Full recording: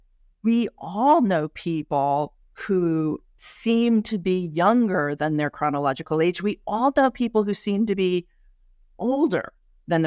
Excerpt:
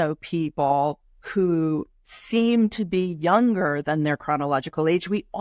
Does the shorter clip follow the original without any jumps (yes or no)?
yes